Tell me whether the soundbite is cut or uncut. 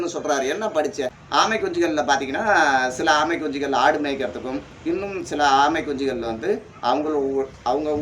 cut